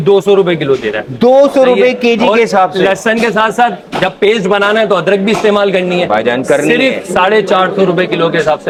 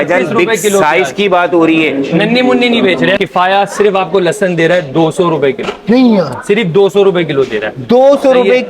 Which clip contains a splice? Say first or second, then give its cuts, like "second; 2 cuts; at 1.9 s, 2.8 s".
second; 1 cut; at 3.2 s